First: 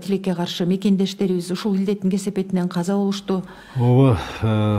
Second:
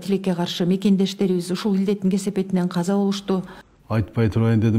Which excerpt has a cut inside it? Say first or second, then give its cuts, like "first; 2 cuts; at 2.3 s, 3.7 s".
second; 1 cut; at 3.6 s